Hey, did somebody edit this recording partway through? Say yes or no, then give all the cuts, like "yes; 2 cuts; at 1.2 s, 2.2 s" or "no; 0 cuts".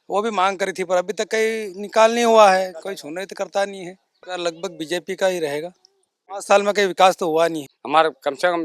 yes; 3 cuts; at 4.2 s, 6.3 s, 7.7 s